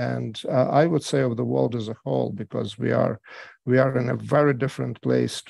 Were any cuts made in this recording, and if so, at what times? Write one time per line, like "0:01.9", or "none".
none

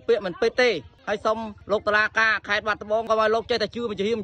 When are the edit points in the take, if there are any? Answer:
0:03.1

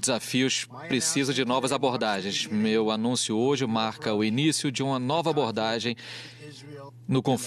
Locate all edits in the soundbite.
none

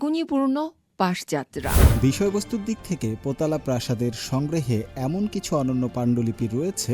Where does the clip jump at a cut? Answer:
0:01.8

